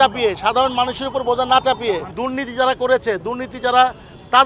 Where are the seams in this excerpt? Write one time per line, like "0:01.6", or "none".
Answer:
0:02.1